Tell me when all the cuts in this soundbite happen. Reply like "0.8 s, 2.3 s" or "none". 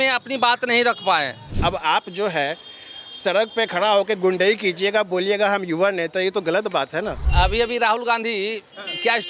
1.4 s, 7.2 s